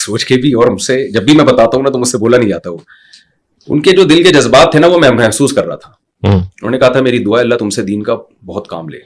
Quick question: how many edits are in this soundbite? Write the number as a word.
zero